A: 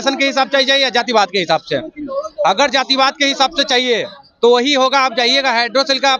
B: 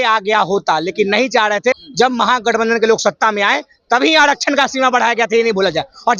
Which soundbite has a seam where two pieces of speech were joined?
B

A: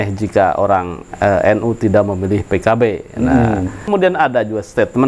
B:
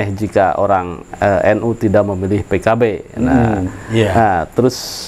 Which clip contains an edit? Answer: A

